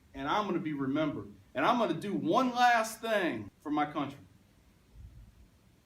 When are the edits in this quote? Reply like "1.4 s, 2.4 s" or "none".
3.5 s